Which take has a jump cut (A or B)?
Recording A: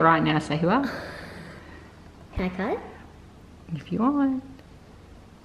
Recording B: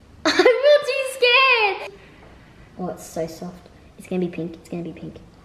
B